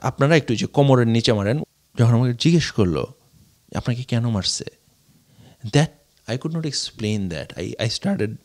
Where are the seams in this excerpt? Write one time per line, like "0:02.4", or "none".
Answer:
0:01.6